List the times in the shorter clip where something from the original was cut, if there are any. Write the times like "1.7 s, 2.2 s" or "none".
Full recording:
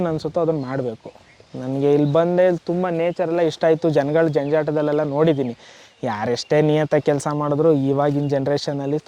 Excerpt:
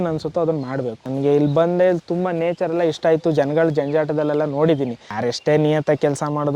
1.0 s, 5.1 s